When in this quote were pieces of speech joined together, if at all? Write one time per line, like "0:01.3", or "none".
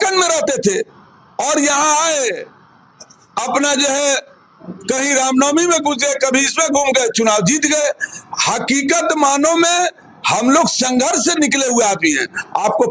none